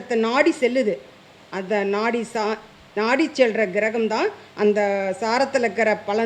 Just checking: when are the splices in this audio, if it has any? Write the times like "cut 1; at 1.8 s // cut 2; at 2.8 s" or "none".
none